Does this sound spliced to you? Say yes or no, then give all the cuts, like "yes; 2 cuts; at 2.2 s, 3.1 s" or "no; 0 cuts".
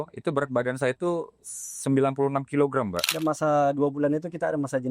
yes; 1 cut; at 3.1 s